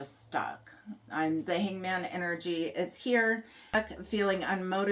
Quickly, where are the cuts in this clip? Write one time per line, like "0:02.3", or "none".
0:03.7